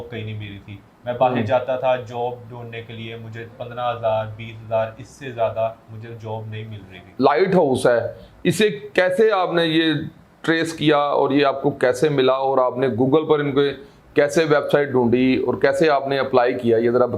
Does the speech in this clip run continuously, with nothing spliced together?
yes; 0 cuts

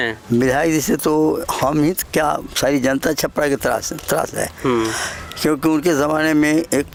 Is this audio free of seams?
yes; 0 cuts

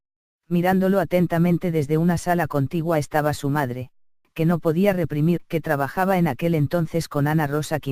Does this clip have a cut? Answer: no; 0 cuts

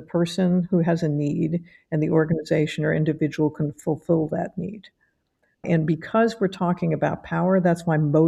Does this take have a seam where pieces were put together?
yes; 1 cut; at 5.6 s

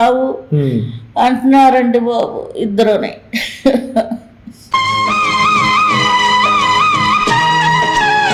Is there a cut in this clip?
no; 0 cuts

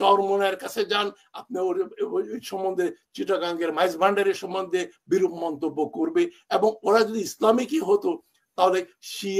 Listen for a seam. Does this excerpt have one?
no; 0 cuts

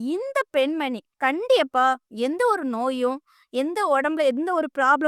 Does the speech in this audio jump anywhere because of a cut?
yes; 1 cut; at 1.1 s

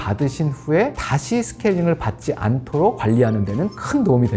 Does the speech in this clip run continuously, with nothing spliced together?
no; 2 cuts; at 1.0 s, 3.0 s

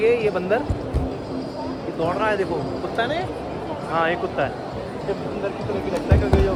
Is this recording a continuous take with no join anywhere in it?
yes; 0 cuts

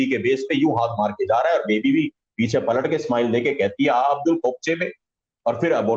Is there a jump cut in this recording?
no; 0 cuts

